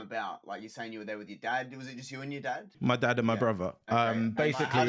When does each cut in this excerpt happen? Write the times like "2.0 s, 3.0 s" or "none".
2.7 s